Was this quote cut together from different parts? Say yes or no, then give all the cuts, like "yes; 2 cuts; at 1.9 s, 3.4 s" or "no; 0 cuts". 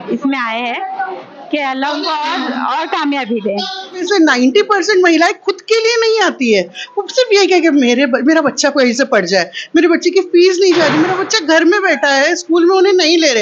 yes; 1 cut; at 4.0 s